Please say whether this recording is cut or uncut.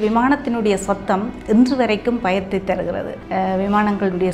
cut